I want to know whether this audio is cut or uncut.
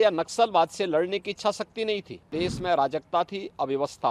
cut